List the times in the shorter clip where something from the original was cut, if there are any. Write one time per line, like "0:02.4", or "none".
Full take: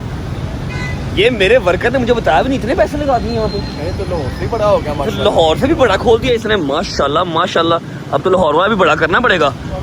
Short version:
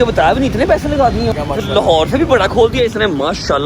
0:01.3